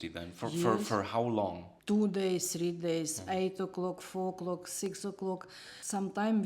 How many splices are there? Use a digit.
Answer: 1